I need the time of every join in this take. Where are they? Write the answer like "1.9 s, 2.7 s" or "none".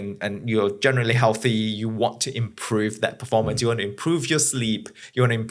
none